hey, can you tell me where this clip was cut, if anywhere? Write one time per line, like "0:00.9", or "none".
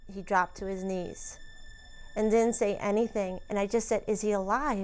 0:03.4